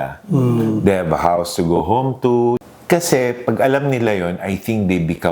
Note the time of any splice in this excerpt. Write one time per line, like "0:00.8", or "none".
0:02.6